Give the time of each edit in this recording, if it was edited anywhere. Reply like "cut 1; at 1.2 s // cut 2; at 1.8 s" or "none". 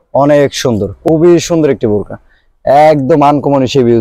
cut 1; at 1.0 s